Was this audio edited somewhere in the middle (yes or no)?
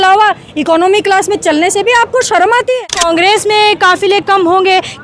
yes